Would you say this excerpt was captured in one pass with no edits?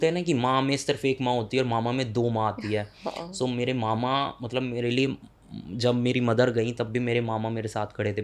yes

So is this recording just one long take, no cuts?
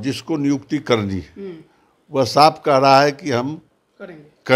yes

